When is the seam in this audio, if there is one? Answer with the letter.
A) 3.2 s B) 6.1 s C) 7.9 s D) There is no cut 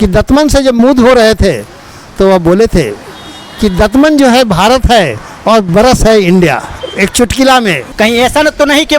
C